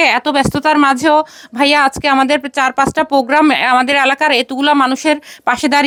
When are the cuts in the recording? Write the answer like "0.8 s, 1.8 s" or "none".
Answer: none